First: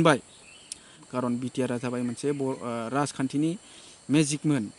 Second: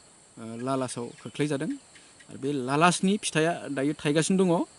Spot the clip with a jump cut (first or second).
first